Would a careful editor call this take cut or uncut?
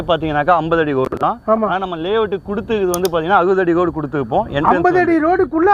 uncut